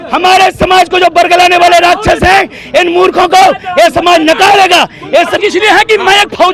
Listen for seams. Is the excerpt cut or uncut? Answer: cut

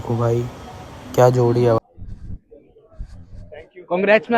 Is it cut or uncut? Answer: cut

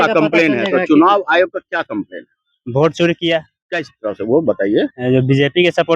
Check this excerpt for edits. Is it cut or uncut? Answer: uncut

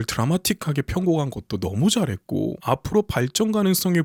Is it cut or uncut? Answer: uncut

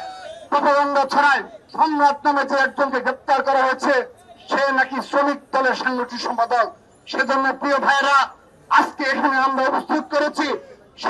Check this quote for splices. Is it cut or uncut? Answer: uncut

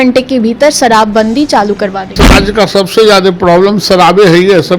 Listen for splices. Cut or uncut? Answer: cut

